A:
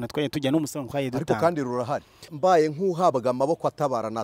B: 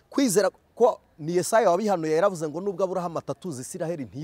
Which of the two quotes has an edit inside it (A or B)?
A